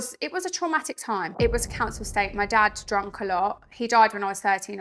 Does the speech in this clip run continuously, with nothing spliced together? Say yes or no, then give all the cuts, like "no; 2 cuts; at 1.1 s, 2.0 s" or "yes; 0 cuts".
no; 1 cut; at 1.3 s